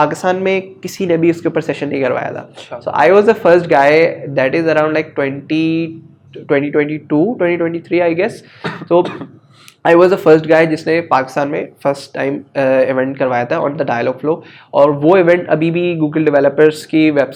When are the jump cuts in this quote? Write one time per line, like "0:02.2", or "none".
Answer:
none